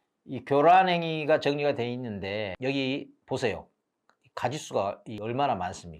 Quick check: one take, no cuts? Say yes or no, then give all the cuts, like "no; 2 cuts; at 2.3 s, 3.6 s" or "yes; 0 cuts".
no; 2 cuts; at 2.5 s, 5.1 s